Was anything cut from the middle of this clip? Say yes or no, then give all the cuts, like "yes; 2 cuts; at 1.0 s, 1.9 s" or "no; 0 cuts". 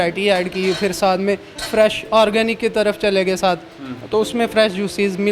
no; 0 cuts